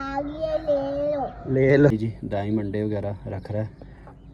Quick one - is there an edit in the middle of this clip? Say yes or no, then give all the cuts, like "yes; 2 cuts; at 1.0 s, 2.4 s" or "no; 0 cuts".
yes; 1 cut; at 1.9 s